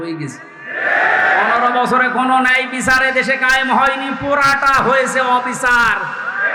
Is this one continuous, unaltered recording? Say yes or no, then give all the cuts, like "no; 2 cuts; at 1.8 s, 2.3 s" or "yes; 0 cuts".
yes; 0 cuts